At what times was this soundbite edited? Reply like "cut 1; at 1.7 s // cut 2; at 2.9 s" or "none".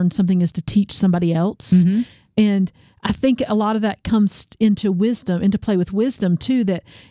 none